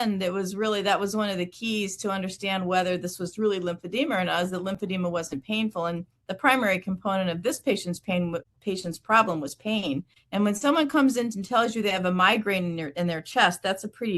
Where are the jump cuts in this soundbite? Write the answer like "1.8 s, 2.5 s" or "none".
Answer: none